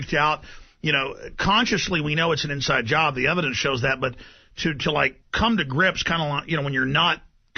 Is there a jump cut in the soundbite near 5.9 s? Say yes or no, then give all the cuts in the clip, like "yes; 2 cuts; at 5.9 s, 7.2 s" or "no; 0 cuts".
no; 0 cuts